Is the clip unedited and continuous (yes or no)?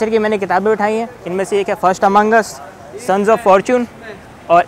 yes